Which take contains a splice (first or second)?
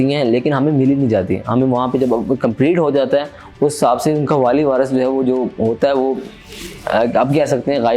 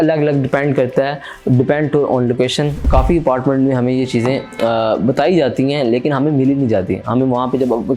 second